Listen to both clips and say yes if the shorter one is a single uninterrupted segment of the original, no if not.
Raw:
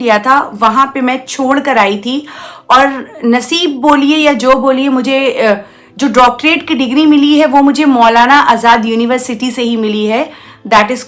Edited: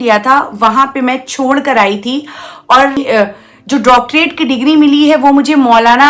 no